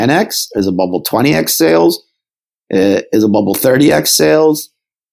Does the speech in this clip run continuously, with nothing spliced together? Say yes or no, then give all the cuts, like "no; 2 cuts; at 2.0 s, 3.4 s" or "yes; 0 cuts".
yes; 0 cuts